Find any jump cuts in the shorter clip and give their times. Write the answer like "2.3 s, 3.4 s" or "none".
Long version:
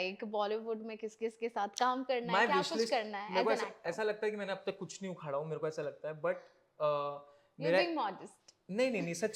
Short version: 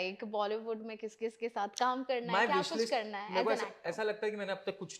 none